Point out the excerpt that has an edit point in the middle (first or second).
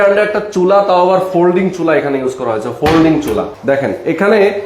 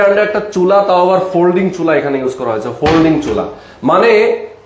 first